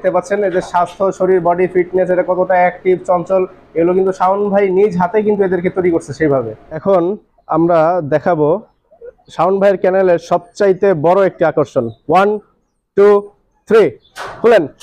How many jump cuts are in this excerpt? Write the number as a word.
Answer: one